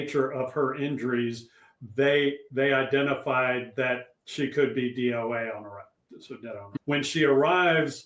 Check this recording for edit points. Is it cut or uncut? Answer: cut